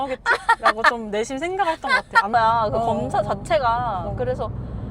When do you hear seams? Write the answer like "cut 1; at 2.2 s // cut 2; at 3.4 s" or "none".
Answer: cut 1; at 2.3 s

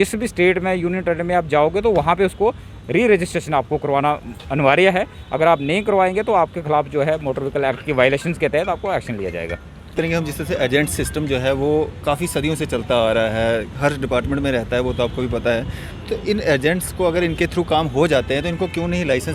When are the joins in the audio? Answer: cut 1; at 9.9 s

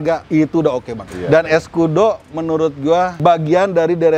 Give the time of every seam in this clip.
cut 1; at 0.8 s // cut 2; at 3.2 s

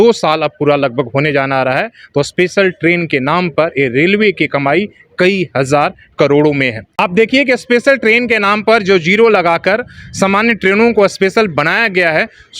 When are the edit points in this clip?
cut 1; at 6.8 s

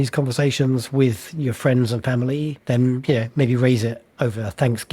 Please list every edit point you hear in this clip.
cut 1; at 2.6 s

